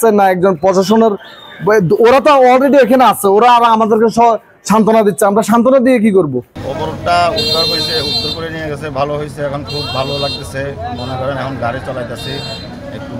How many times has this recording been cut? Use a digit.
0